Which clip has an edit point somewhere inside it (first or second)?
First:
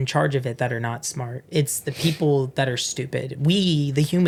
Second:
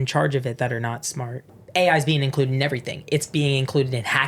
second